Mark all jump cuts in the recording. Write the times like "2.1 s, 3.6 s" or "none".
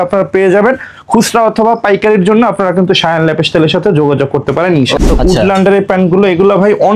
5.0 s

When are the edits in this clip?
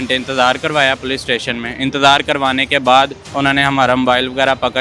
3.2 s

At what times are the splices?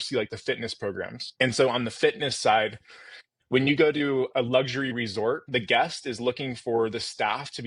4.3 s, 5.4 s

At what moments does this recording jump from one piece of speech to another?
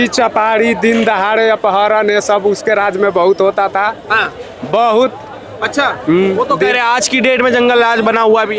none

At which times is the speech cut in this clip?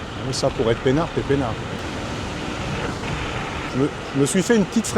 1.8 s, 3.7 s

